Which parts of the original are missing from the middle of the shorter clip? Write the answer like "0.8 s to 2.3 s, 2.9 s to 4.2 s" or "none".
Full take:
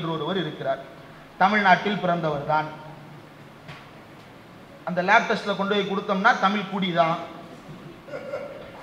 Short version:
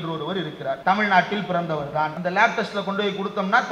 0.8 s to 1.3 s, 2.7 s to 4.9 s

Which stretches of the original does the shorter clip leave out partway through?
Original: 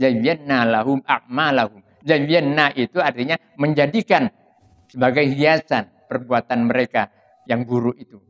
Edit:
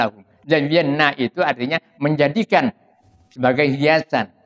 none

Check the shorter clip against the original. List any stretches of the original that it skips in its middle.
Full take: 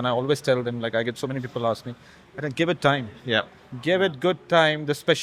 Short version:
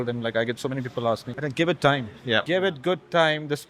1.9 s to 2.3 s, 3.4 s to 3.8 s

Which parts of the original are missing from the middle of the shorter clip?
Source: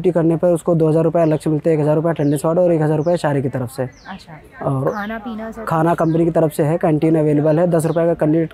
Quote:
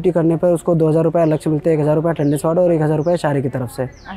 none

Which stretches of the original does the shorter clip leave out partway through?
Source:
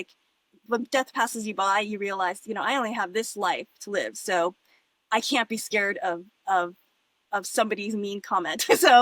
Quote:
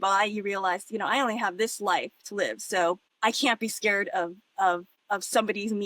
4.6 s to 5.0 s, 6.8 s to 7.1 s

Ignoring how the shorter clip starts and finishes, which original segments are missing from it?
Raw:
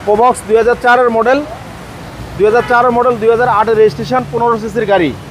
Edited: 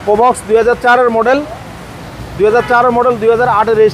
none

